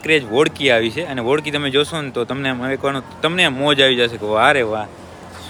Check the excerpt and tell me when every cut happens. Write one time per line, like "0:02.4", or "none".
none